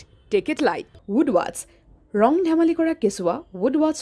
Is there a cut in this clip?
yes; 1 cut; at 0.9 s

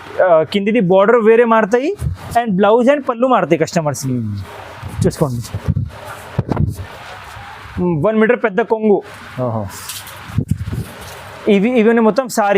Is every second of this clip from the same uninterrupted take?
no; 1 cut; at 6.8 s

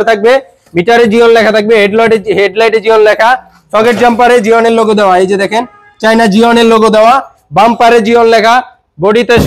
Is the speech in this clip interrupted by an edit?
no; 0 cuts

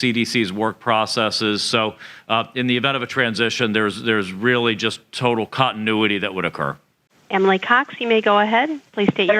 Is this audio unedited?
yes; 0 cuts

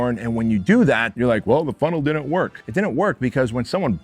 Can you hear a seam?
yes; 2 cuts; at 1.1 s, 2.6 s

